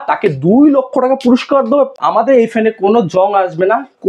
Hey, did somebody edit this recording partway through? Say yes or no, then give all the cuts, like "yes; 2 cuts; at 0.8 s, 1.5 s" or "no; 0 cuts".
yes; 1 cut; at 1.9 s